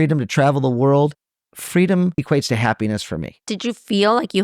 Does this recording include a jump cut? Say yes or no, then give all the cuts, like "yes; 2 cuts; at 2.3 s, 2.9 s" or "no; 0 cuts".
yes; 2 cuts; at 2.2 s, 3.5 s